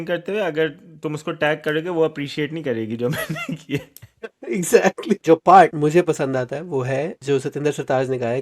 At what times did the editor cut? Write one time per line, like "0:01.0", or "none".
0:05.2
0:05.7
0:07.1